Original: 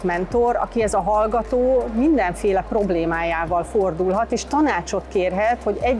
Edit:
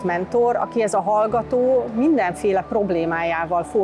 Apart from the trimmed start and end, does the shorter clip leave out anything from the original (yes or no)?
no